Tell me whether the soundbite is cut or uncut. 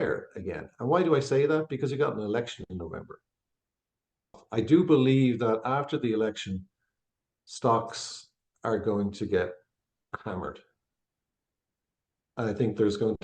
cut